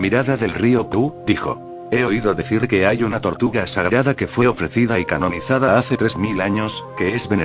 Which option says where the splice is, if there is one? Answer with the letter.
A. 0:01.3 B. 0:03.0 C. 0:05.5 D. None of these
A